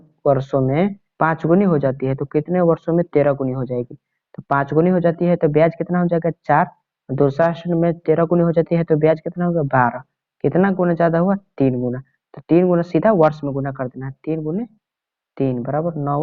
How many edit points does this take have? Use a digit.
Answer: 1